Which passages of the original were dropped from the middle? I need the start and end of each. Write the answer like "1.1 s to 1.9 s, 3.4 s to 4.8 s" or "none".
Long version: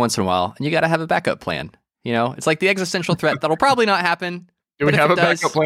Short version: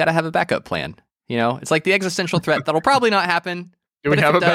none

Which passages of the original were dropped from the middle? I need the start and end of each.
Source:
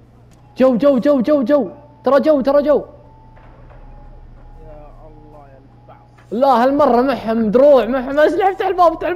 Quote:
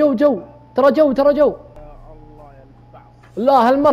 3.0 s to 4.7 s

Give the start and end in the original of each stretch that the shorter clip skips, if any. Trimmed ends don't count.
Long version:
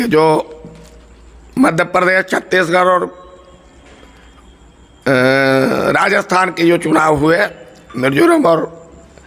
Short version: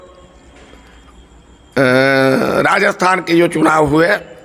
none

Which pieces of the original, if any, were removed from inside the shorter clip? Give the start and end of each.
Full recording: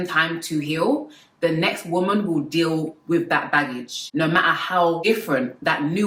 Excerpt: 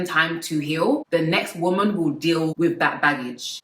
1.0 s to 1.3 s, 2.8 s to 3.0 s

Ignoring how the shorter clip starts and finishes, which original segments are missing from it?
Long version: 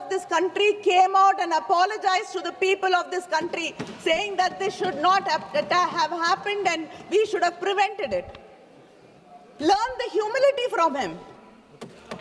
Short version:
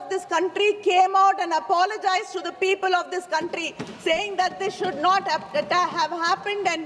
none

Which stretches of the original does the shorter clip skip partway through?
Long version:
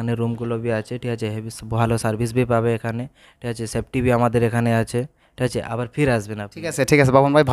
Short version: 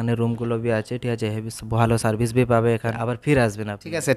2.9 s to 5.6 s

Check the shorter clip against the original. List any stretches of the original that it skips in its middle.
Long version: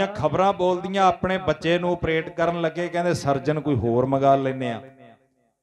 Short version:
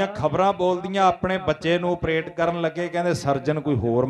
none

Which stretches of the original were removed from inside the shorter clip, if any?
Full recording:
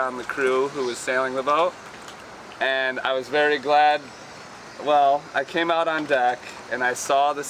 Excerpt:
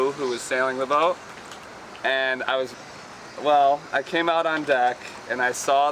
3.3 s to 4.1 s

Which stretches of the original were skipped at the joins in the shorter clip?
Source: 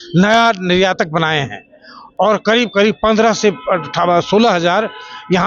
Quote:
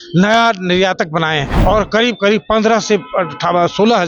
1.5 s to 2.0 s

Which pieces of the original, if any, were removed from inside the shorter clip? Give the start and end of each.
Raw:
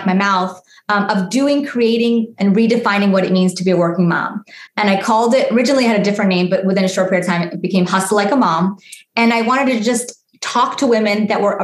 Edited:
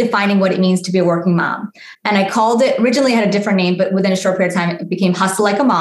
none

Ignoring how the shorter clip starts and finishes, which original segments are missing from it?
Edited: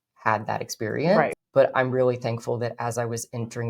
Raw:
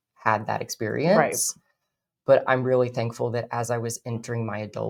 1.4 s to 2.1 s

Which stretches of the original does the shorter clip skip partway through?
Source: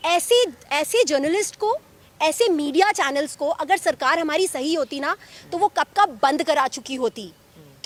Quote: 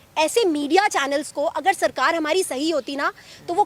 none

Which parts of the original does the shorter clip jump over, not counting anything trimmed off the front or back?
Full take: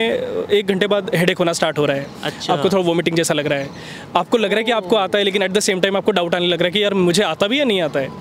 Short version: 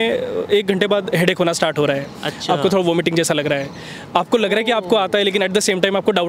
none

